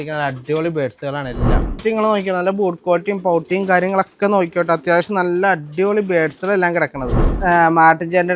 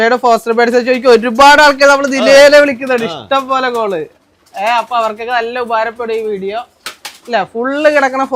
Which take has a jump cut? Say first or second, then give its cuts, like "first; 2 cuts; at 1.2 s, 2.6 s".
first; 2 cuts; at 1.8 s, 7.4 s